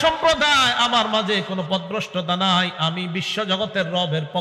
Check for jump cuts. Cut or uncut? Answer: uncut